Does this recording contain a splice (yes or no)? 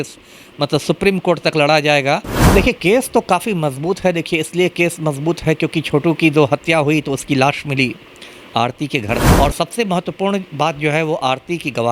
yes